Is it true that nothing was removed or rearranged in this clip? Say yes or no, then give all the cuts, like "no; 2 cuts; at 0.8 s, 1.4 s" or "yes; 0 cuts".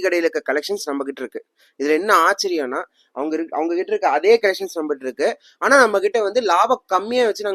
yes; 0 cuts